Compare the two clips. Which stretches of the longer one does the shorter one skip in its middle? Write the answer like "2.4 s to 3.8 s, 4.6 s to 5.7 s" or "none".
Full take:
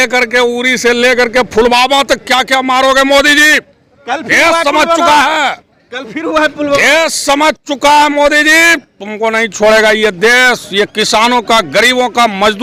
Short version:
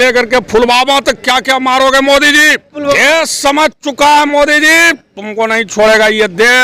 3.8 s to 6.6 s